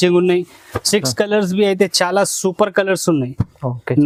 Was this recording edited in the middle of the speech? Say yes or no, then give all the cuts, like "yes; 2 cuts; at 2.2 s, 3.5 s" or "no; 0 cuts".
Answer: no; 0 cuts